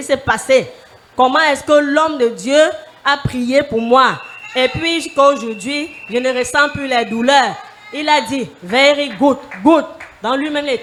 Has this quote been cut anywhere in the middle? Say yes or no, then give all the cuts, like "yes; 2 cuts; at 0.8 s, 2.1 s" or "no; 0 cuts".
no; 0 cuts